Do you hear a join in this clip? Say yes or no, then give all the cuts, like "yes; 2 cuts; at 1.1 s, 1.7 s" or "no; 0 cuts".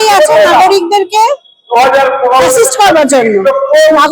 no; 0 cuts